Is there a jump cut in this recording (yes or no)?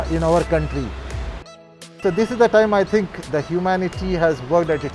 yes